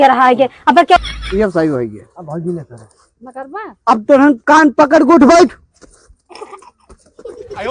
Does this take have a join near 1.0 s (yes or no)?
yes